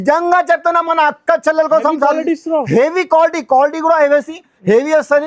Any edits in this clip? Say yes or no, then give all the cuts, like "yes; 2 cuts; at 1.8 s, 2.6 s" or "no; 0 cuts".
no; 0 cuts